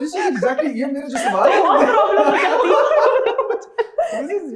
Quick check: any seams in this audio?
no; 0 cuts

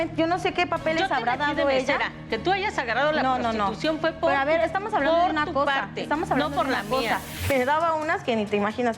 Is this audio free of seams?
no; 1 cut; at 7.3 s

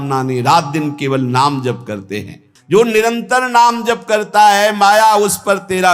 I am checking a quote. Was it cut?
yes; 1 cut; at 2.4 s

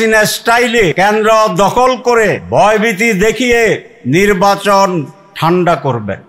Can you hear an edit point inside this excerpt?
yes; 4 cuts; at 0.9 s, 2.4 s, 3.9 s, 5.2 s

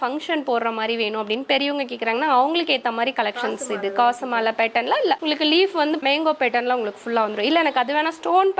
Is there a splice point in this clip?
no; 0 cuts

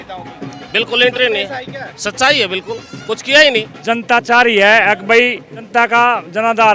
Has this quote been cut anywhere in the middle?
yes; 2 cuts; at 3.7 s, 5.5 s

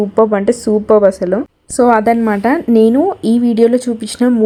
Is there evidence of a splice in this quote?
no; 0 cuts

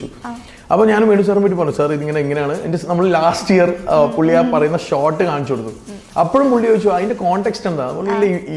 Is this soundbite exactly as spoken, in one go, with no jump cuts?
yes; 0 cuts

